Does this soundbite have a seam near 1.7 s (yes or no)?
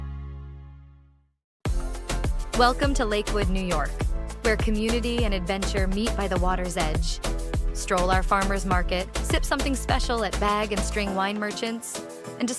yes